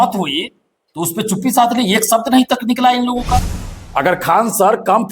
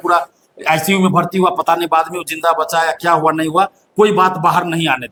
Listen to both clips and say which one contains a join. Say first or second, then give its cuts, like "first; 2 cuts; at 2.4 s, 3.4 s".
first; 1 cut; at 3.6 s